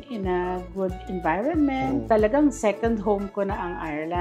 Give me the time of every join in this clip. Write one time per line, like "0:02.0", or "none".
0:02.0